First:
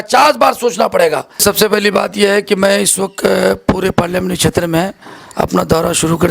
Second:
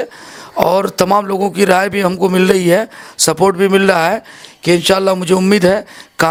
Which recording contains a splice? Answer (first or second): first